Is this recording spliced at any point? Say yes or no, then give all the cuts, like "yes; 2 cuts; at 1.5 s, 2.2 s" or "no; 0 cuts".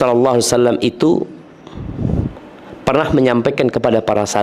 no; 0 cuts